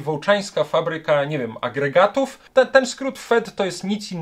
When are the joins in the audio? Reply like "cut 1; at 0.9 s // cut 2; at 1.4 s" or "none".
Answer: cut 1; at 2.4 s